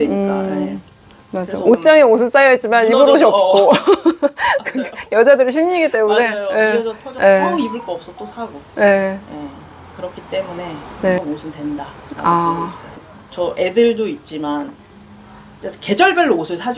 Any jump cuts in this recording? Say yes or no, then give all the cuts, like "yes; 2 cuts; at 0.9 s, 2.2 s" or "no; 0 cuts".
no; 0 cuts